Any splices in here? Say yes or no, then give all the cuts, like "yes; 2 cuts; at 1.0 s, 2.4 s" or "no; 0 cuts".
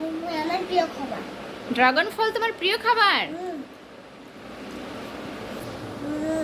no; 0 cuts